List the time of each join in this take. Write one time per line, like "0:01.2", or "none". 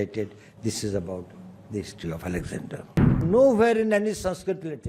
0:03.2